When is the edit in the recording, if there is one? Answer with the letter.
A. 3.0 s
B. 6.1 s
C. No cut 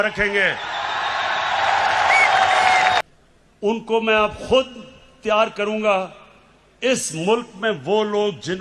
A